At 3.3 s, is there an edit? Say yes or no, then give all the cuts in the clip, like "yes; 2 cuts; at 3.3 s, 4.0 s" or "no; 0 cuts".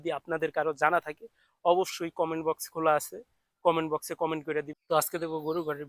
no; 1 cut; at 4.8 s